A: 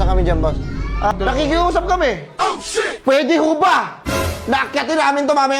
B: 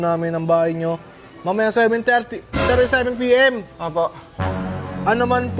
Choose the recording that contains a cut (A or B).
A